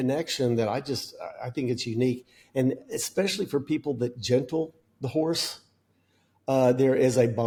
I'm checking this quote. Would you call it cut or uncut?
uncut